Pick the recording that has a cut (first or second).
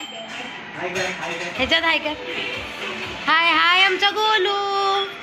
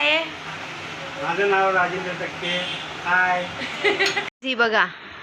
second